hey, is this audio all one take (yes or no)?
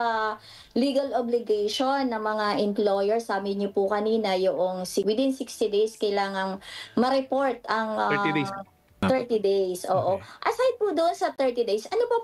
no